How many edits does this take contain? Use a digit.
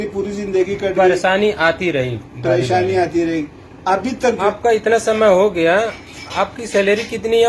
1